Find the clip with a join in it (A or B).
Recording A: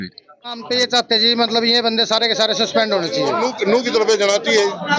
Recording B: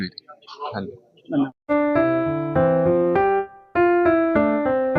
A